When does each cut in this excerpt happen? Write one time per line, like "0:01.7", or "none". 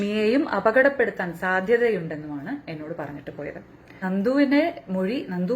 0:04.0

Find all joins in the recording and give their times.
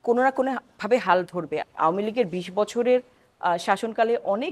0:01.7

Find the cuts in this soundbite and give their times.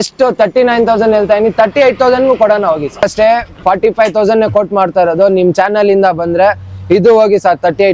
0:03.1

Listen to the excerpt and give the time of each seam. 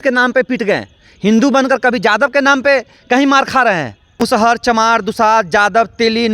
0:04.0

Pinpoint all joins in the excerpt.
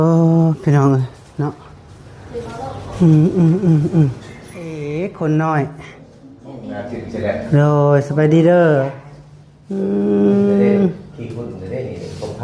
0:04.8

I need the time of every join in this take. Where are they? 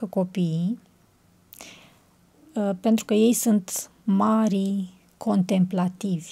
none

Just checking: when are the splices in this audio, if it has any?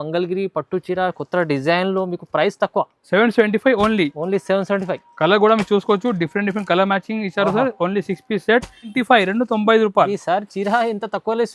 0:08.9

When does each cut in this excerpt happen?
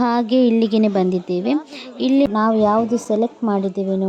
0:02.3

